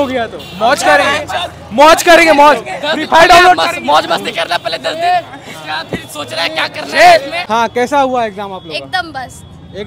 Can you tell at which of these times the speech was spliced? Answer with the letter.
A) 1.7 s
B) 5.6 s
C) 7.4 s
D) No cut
C